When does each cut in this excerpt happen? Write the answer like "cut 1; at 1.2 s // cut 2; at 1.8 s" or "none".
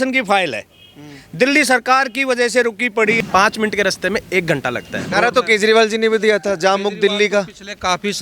cut 1; at 3.2 s // cut 2; at 5.0 s